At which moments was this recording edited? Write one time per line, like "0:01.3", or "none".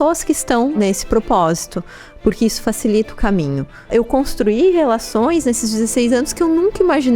0:00.7
0:03.9